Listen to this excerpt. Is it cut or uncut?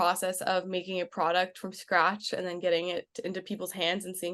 uncut